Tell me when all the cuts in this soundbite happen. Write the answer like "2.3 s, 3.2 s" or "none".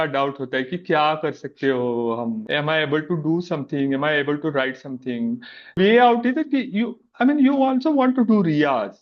2.4 s, 5.7 s